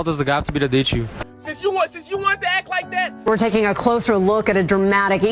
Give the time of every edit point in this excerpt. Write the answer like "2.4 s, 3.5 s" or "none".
1.1 s, 3.1 s